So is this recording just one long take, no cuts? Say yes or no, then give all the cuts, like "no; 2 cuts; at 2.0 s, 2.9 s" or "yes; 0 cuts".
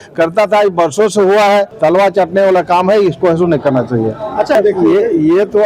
no; 2 cuts; at 1.7 s, 4.6 s